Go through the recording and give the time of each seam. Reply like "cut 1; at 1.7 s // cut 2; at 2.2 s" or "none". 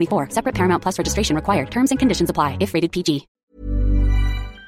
cut 1; at 3.4 s